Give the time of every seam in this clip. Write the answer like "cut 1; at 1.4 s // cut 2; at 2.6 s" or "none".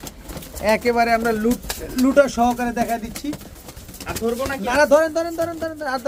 none